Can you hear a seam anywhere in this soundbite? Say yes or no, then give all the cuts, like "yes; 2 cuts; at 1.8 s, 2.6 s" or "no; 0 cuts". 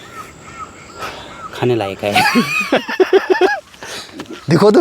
no; 0 cuts